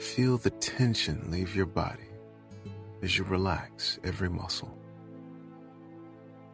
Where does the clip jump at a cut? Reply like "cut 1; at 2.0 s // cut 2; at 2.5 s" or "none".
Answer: cut 1; at 4.6 s